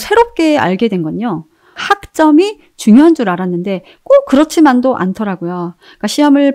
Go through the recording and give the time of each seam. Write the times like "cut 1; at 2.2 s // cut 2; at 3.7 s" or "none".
cut 1; at 1.8 s